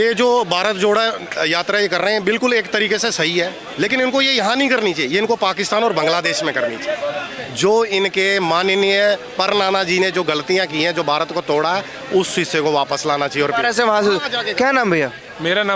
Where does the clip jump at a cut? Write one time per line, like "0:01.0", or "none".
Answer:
none